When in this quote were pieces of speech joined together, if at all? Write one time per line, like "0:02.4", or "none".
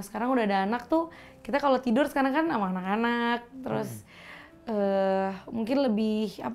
none